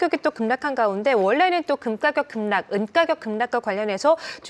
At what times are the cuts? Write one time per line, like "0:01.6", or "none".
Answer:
none